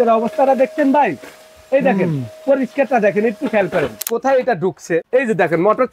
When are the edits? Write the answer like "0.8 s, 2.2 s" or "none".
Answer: 4.0 s, 5.0 s